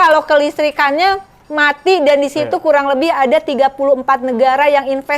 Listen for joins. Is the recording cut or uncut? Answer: uncut